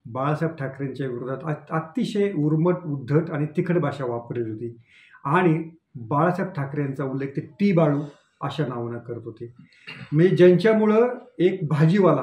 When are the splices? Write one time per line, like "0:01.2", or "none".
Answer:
none